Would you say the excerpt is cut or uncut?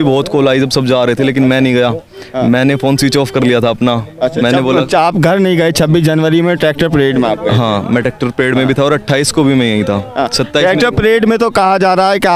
uncut